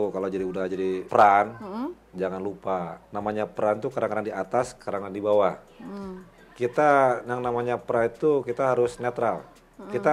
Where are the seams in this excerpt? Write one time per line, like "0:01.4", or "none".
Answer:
0:01.0
0:03.0